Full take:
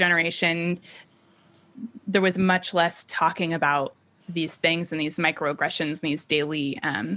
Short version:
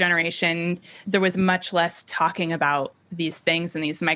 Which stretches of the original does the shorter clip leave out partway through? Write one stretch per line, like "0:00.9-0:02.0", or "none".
0:00.9-0:01.9
0:04.0-0:04.2